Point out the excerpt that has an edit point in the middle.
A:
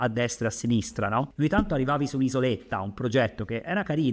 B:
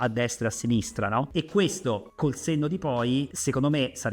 B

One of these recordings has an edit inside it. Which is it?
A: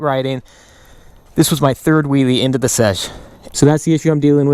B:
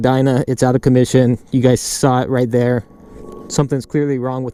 A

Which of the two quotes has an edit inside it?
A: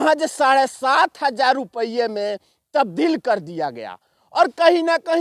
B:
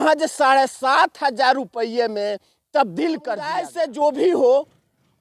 B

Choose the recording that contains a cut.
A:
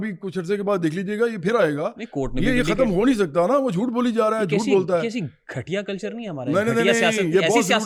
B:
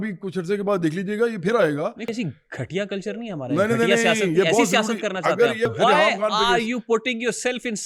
B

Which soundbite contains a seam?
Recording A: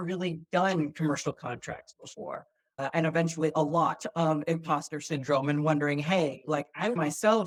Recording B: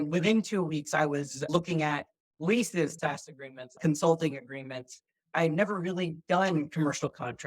B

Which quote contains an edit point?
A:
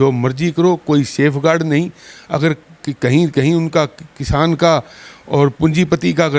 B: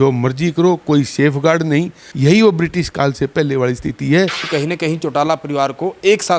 B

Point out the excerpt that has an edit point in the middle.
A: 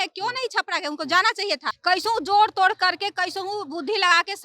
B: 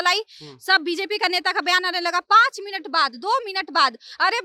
A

